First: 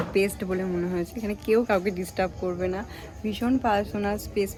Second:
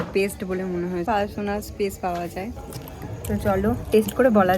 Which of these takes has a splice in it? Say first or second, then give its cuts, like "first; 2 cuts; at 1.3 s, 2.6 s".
second; 2 cuts; at 1.1 s, 2.8 s